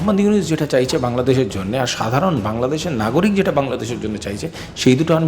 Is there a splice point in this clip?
no; 0 cuts

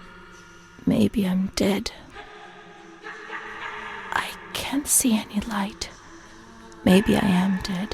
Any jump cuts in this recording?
no; 0 cuts

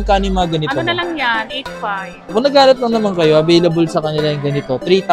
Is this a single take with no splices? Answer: no; 1 cut; at 2.3 s

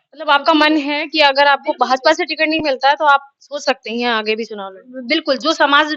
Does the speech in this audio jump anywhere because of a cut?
no; 0 cuts

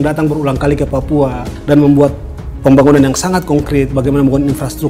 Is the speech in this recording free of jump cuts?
yes; 0 cuts

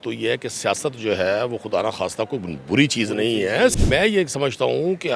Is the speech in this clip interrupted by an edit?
yes; 1 cut; at 3.7 s

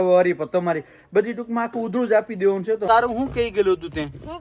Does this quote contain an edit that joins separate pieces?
yes; 1 cut; at 2.8 s

